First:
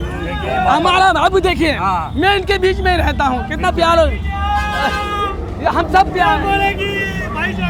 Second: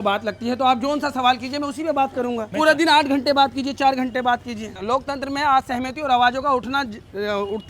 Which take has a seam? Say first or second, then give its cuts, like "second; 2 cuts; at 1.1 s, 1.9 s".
second; 2 cuts; at 2.5 s, 4.8 s